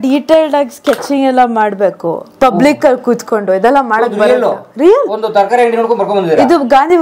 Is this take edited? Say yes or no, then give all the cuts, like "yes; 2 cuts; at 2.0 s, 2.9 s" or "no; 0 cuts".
no; 0 cuts